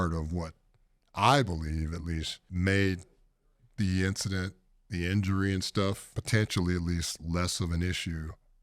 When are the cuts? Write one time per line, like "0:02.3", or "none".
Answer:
0:02.4
0:06.1